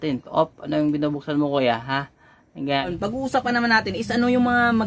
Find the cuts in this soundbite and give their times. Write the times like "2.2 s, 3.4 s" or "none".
2.9 s